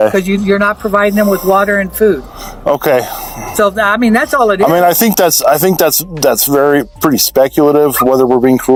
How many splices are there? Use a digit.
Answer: 0